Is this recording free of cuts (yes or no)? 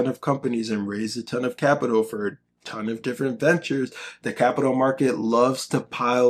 yes